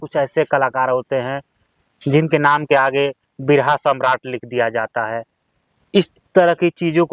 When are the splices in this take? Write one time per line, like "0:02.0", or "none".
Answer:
none